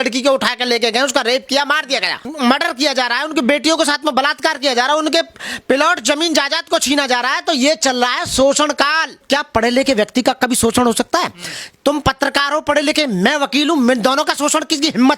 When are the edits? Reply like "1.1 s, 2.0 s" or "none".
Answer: 2.2 s, 9.2 s